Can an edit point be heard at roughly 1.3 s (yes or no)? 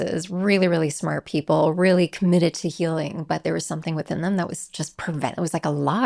no